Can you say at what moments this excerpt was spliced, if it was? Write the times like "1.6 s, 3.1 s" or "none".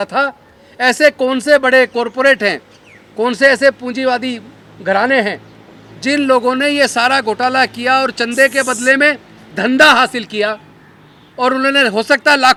none

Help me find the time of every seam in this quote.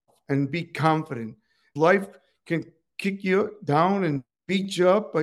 1.7 s

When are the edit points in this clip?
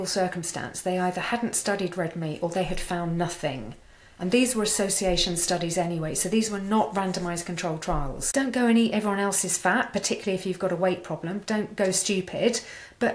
8.2 s

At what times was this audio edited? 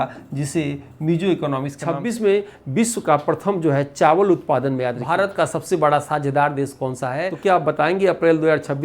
1.7 s, 5.0 s, 7.3 s

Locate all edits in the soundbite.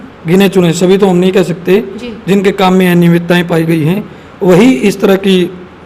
none

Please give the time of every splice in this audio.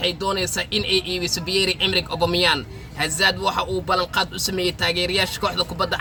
none

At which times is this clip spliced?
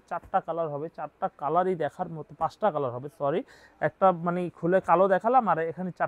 none

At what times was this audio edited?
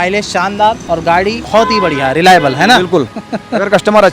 1.0 s, 3.2 s

